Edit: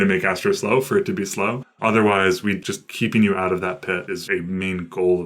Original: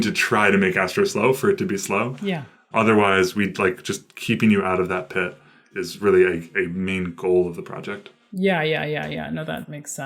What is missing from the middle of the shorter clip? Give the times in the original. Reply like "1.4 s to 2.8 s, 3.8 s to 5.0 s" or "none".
2.2 s to 2.6 s, 3.5 s to 3.9 s, 5.5 s to 6.5 s